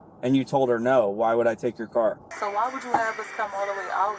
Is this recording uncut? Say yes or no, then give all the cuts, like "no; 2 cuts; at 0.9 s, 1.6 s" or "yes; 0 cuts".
no; 1 cut; at 2.3 s